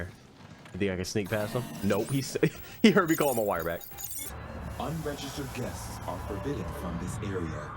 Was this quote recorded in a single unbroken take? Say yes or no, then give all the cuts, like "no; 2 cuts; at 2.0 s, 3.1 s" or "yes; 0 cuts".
no; 1 cut; at 4.3 s